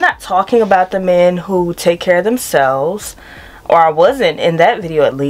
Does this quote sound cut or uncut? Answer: uncut